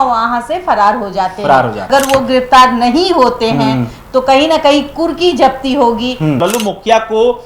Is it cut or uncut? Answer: cut